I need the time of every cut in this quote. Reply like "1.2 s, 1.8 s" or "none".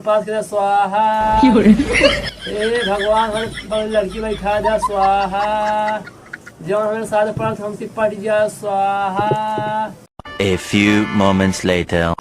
10.2 s